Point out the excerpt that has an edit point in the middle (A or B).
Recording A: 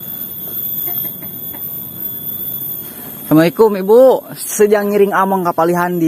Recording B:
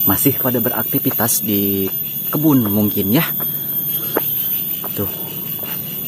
A